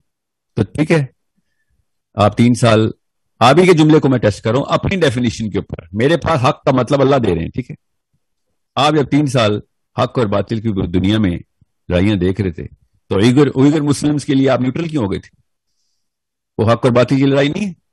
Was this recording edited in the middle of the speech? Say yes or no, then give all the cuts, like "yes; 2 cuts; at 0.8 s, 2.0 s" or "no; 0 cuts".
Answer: no; 0 cuts